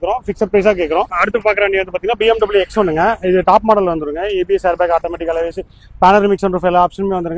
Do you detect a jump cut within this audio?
yes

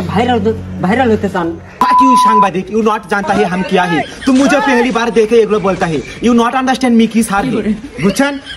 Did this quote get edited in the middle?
yes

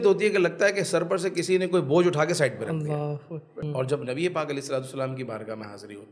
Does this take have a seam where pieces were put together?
yes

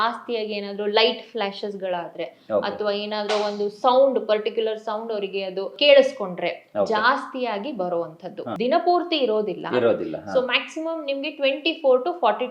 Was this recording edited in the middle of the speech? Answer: yes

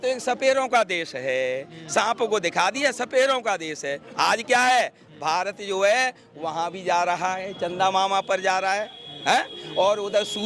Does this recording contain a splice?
no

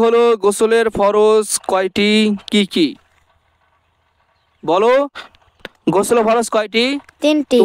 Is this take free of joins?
yes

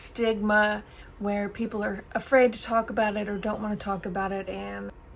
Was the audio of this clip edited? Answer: no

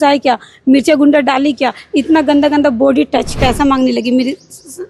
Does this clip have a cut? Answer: yes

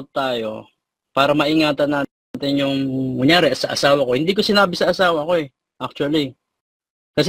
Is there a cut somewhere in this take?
no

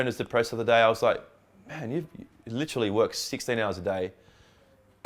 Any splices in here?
no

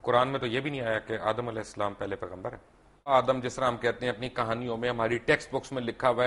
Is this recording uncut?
no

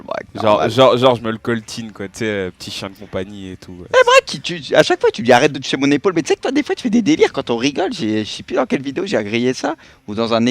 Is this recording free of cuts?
no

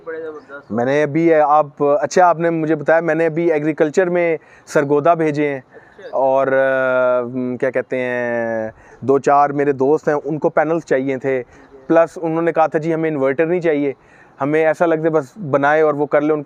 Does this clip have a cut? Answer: no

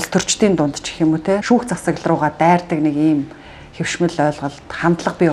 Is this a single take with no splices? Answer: yes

